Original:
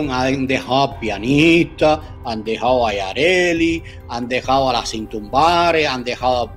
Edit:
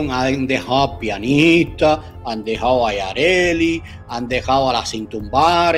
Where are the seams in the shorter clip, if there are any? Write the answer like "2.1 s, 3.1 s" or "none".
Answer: none

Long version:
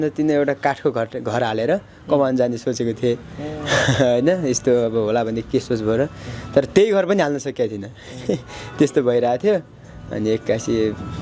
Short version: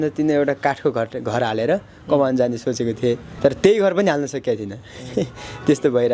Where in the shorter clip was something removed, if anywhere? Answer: 3.3 s

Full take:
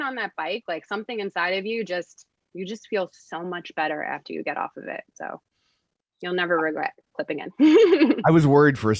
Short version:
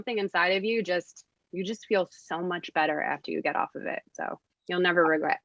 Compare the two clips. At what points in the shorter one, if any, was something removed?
4.5 s

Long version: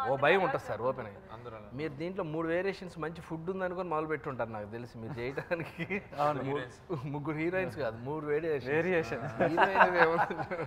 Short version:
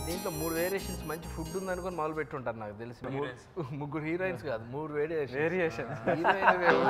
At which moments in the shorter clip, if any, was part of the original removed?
3.0 s

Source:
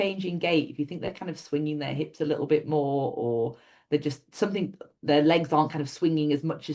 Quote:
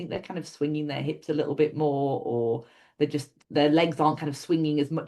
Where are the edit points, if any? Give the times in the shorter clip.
3.3 s

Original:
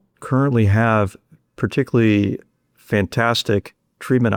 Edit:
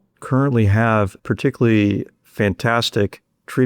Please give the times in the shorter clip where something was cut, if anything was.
1.2 s, 2.2 s

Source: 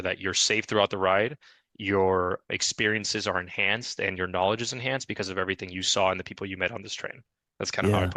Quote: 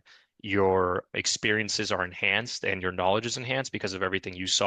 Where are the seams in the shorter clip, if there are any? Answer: none

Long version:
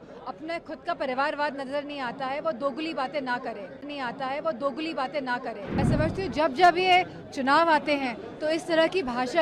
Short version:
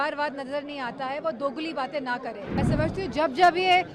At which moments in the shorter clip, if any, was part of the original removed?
2.0 s

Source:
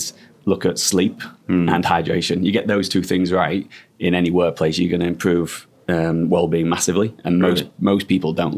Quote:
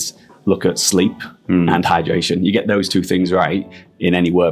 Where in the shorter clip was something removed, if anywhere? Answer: none

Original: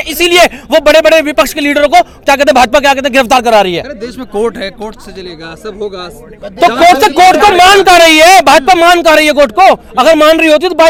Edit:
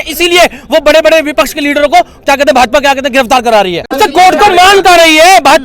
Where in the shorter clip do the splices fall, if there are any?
4.0 s

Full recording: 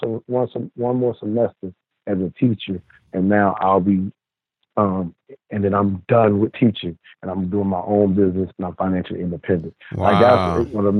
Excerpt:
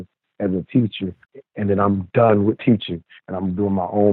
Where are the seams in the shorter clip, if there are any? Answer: 1.3 s

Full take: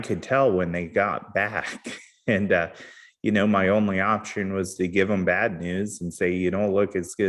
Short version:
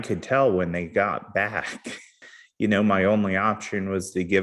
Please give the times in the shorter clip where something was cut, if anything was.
2.1 s

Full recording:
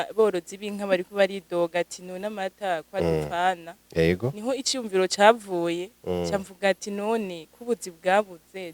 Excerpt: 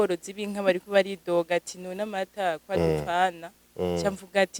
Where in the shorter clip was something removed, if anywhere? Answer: 3.6 s

